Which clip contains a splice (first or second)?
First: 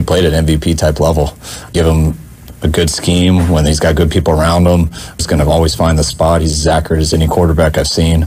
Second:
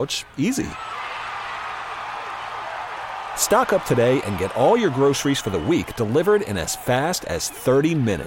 first